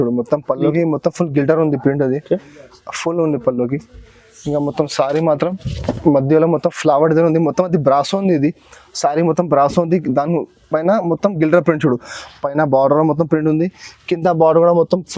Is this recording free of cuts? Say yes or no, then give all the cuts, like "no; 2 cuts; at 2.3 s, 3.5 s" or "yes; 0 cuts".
yes; 0 cuts